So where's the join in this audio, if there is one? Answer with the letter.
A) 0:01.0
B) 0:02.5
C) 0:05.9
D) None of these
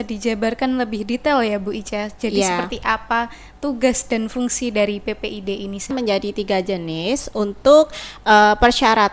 C